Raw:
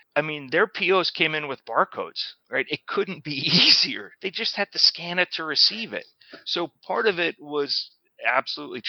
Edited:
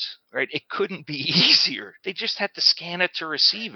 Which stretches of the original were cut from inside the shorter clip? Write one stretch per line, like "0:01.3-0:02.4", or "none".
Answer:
none